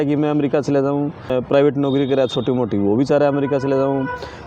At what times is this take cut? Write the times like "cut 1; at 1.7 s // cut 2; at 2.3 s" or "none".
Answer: cut 1; at 1.3 s